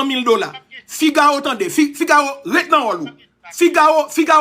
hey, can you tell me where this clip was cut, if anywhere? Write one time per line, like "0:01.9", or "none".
none